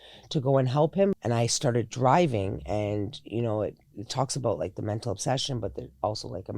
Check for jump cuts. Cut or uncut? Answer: cut